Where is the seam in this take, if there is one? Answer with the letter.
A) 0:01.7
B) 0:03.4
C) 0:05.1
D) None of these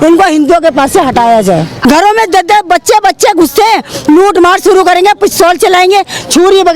A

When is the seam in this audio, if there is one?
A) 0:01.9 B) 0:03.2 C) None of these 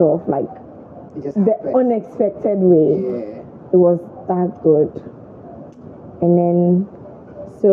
C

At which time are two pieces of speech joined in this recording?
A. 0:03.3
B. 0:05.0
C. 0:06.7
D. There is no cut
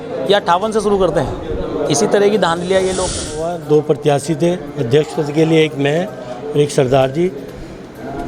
A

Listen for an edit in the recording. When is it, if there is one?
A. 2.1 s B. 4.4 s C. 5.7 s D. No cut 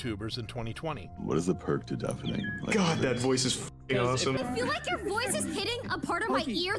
B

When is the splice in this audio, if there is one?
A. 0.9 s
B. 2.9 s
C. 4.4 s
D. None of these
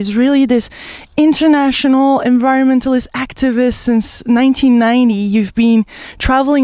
C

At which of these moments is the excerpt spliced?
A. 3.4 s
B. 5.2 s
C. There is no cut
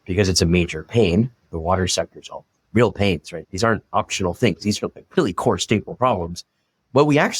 A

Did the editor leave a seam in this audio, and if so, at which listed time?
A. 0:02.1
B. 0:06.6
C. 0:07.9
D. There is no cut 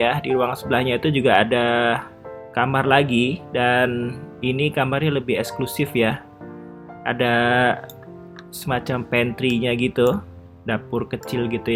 D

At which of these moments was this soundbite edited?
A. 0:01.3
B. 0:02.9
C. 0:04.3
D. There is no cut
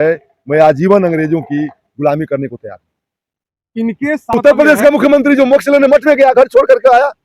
C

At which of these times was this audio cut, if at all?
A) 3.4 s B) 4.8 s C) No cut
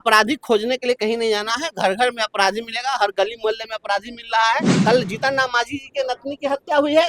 B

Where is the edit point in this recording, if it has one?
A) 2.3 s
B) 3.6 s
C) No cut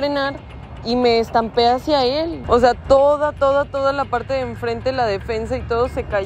A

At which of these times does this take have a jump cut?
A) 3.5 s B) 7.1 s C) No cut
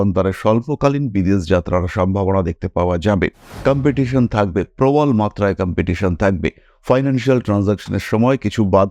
A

